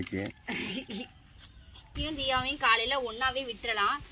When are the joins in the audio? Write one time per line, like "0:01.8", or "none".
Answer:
0:01.9